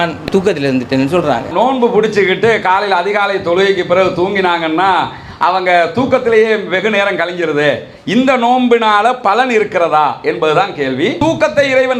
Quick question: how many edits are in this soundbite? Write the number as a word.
two